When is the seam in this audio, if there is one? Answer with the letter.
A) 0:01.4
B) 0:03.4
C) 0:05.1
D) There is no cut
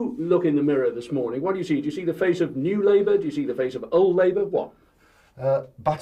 D